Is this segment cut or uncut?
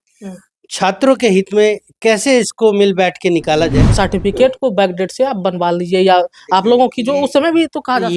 cut